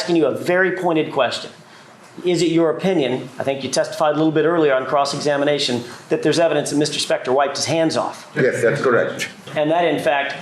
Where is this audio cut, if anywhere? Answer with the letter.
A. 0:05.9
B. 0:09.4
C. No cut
B